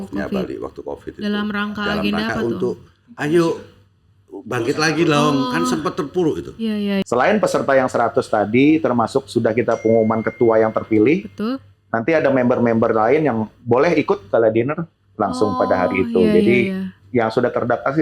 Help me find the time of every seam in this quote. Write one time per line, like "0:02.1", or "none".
0:07.0